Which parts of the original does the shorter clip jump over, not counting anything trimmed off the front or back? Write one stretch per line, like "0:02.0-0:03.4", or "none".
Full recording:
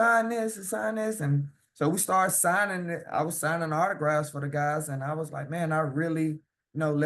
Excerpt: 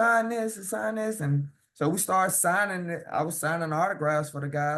none